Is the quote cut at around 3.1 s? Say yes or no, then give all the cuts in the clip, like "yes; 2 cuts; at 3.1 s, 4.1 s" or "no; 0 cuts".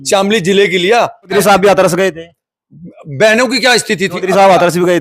no; 1 cut; at 1.3 s